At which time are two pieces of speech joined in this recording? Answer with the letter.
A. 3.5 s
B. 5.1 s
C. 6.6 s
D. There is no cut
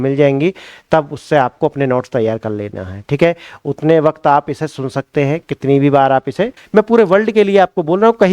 C